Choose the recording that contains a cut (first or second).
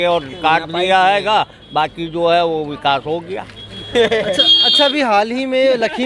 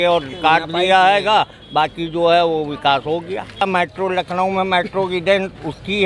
second